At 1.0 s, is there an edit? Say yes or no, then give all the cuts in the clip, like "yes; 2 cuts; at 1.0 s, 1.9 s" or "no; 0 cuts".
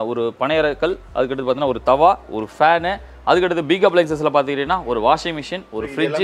no; 0 cuts